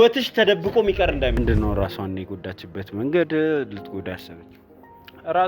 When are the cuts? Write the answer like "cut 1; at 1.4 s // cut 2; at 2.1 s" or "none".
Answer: cut 1; at 1.4 s